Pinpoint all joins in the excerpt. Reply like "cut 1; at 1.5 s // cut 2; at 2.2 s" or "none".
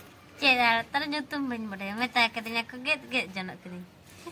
none